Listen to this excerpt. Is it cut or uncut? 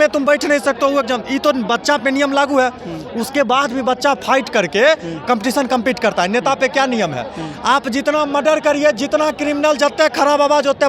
uncut